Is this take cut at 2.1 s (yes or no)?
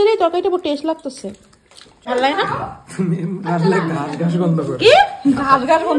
yes